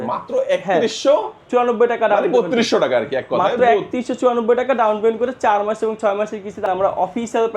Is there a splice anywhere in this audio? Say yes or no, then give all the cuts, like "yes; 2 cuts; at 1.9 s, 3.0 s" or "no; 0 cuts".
yes; 1 cut; at 6.7 s